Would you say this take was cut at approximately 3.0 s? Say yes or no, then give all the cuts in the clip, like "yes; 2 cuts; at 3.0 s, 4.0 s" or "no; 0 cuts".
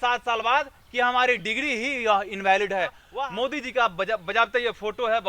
yes; 1 cut; at 3.0 s